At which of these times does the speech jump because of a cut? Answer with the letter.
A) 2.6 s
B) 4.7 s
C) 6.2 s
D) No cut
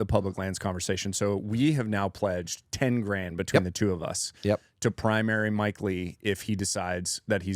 D